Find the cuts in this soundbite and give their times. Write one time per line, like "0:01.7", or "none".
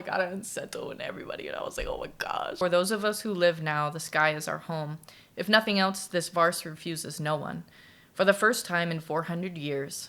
0:02.6

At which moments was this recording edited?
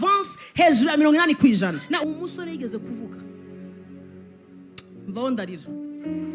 0:02.0

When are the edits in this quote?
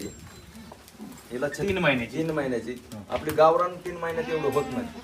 none

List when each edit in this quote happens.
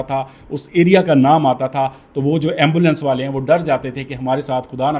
none

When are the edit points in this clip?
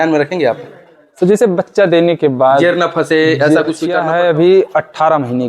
0:04.0

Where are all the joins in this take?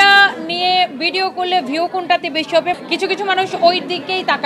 0:02.8

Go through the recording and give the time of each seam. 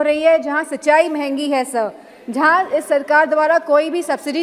none

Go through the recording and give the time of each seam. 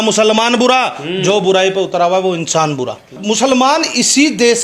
0:03.2

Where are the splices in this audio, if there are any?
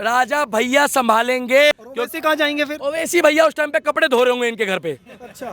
0:01.7

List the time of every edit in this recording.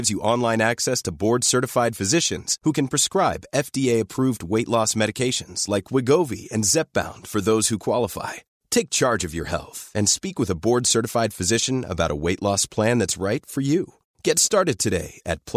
none

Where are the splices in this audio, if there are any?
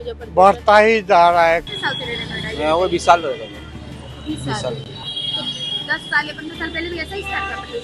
0:01.7

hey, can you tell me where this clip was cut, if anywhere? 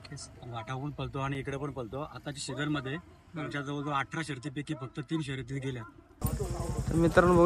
0:06.0

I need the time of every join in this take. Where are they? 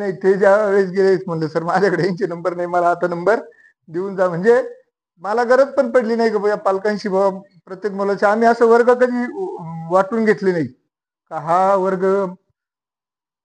none

